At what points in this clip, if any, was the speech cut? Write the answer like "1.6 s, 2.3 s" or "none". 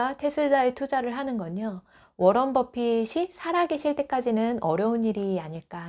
none